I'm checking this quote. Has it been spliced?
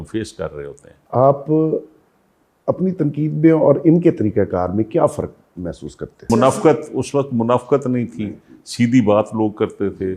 yes; 2 cuts; at 1.0 s, 6.3 s

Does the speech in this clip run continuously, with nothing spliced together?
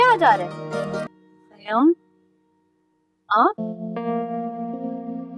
no; 1 cut; at 1.1 s

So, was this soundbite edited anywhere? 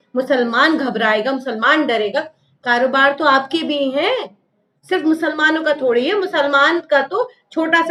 no; 0 cuts

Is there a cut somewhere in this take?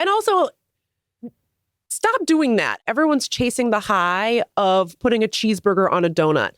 yes; 1 cut; at 2.8 s

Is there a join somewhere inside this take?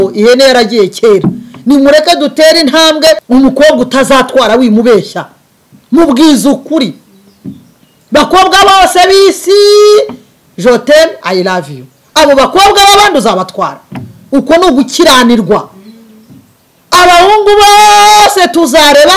yes; 1 cut; at 3.2 s

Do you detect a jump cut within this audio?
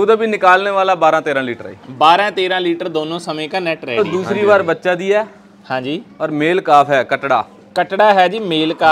yes; 1 cut; at 4.0 s

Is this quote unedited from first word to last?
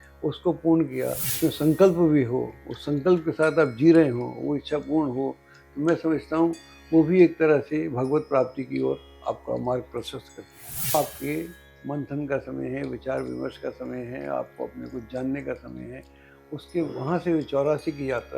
no; 2 cuts; at 1.3 s, 10.9 s

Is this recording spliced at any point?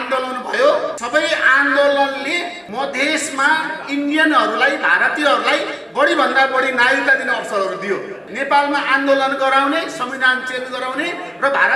yes; 3 cuts; at 1.0 s, 2.6 s, 8.3 s

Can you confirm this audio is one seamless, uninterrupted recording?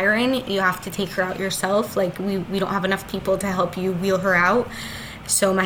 yes; 0 cuts

